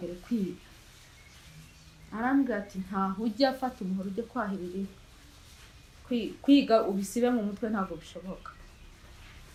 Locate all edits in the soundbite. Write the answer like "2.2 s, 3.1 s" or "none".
none